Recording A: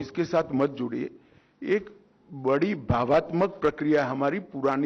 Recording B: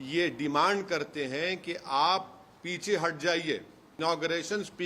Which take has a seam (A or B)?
B